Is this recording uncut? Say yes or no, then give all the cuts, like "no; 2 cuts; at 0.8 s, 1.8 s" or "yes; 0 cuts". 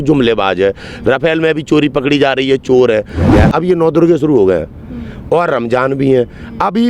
no; 1 cut; at 3.3 s